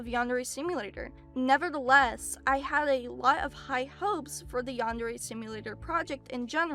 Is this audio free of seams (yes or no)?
yes